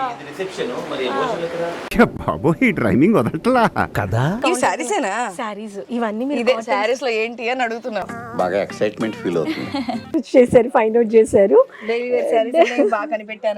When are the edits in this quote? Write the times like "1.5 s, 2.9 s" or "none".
4.4 s, 10.2 s

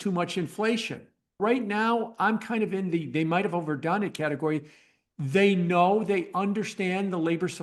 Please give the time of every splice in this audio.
1.4 s

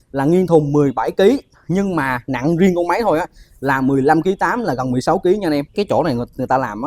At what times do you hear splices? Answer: 5.7 s

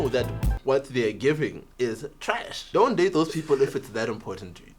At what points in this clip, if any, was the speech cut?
2.6 s

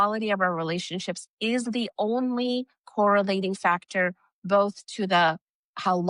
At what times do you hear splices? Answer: none

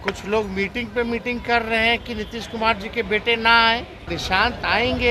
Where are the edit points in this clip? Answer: 4.1 s

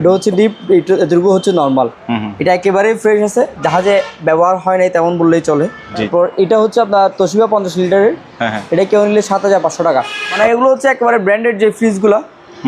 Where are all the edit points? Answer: 2.0 s, 6.1 s, 10.2 s

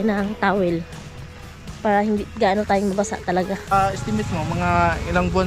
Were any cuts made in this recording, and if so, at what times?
3.7 s

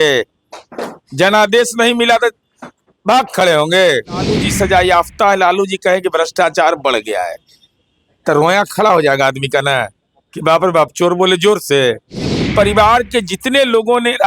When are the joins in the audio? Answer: 4.4 s, 12.4 s

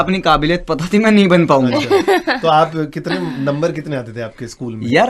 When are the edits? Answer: none

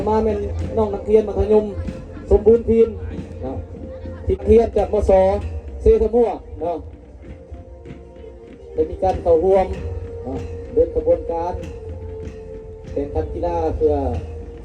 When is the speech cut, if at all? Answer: 4.4 s

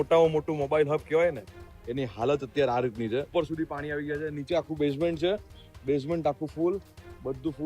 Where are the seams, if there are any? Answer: 3.3 s

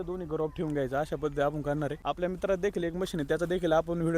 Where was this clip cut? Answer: 2.0 s

